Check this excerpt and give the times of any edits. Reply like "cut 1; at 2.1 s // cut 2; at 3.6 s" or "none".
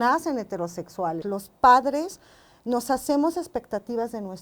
cut 1; at 1.2 s